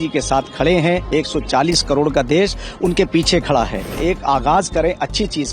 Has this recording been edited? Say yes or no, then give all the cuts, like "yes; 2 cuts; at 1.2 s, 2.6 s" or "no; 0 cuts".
yes; 1 cut; at 4.0 s